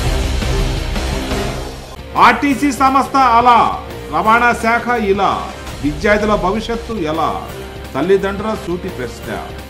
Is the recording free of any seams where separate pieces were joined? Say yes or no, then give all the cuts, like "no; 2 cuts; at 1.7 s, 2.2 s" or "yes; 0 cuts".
no; 1 cut; at 1.5 s